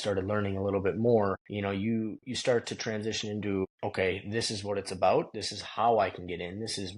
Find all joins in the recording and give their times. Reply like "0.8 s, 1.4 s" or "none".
1.5 s, 3.7 s